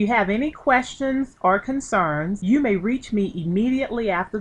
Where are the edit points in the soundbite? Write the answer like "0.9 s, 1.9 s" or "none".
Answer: 2.4 s